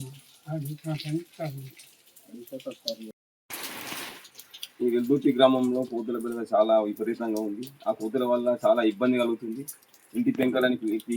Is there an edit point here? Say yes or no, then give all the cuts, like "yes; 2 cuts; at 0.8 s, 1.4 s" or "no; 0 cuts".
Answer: yes; 1 cut; at 3.1 s